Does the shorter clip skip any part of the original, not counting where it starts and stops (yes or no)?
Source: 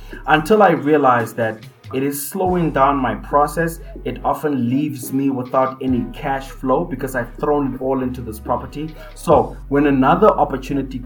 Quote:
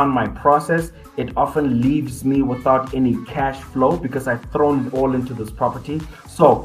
no